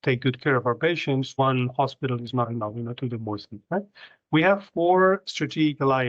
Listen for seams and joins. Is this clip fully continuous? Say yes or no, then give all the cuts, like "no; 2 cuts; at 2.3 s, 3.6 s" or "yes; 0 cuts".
yes; 0 cuts